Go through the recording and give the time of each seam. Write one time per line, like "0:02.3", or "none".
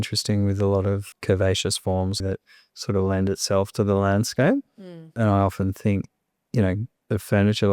0:01.1
0:02.2
0:05.1